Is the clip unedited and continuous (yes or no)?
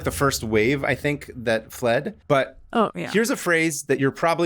no